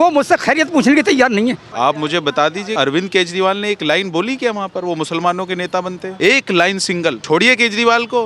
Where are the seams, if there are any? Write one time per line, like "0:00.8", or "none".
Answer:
0:01.7
0:02.7
0:06.1
0:07.2